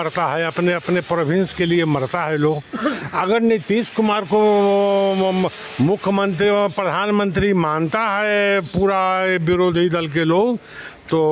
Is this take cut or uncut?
uncut